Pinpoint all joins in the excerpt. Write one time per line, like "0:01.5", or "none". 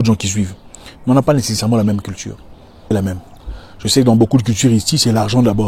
0:02.9